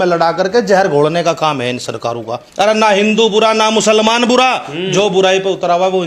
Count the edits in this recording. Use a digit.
1